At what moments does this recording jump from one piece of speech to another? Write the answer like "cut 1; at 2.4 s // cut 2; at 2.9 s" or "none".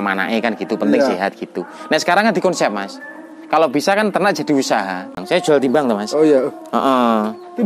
cut 1; at 5.2 s